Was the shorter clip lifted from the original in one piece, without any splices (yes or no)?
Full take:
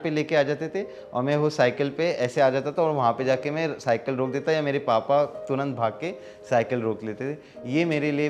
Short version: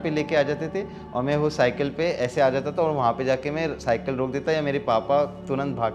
yes